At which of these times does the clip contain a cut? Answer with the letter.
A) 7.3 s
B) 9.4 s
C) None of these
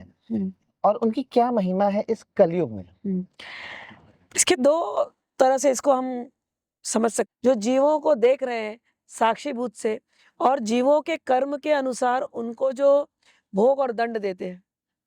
A